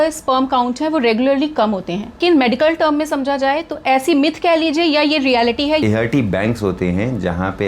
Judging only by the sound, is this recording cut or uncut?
cut